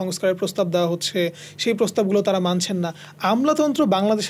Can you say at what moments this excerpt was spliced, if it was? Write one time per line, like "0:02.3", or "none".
none